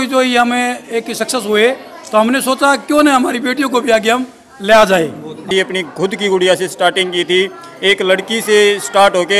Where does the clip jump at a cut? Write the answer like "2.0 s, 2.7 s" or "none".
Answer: 5.5 s